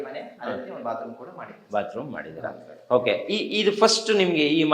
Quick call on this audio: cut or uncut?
uncut